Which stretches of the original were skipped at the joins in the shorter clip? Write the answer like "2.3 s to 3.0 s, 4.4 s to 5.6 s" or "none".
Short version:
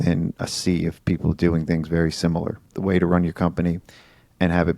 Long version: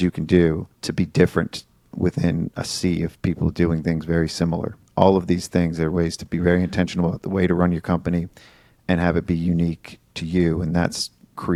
4.9 s to 7.2 s